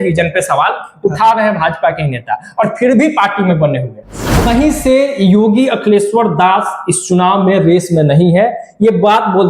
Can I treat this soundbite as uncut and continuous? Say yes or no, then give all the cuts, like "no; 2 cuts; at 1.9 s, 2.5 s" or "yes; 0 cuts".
no; 1 cut; at 4.4 s